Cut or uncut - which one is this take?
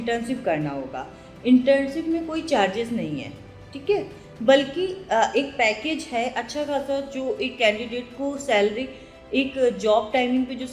uncut